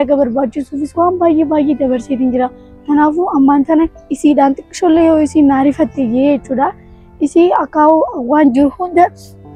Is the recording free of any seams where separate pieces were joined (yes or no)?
yes